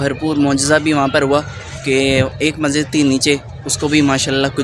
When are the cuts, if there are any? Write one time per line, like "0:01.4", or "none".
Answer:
none

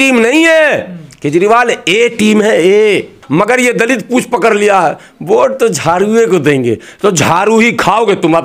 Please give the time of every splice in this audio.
0:03.2

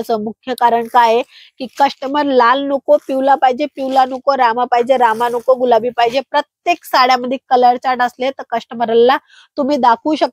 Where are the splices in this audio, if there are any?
none

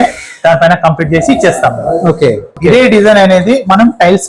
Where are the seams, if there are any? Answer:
0:02.5

